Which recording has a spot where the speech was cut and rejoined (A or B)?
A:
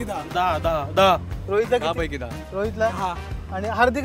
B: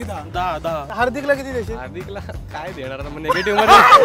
B